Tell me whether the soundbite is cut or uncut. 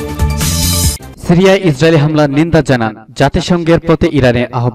uncut